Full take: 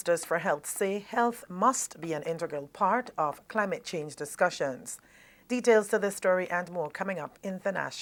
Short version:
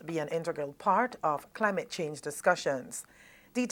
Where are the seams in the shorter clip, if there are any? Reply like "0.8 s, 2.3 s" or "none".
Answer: none